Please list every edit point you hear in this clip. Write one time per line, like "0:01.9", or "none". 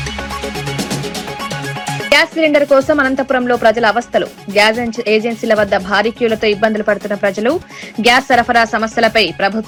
none